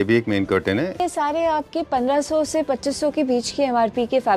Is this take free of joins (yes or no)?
no